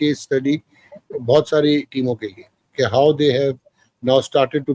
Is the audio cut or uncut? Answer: uncut